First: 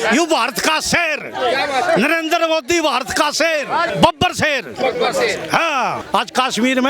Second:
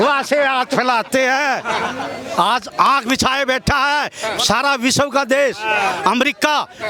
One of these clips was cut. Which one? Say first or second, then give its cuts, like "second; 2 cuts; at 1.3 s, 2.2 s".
first; 2 cuts; at 3.9 s, 6.0 s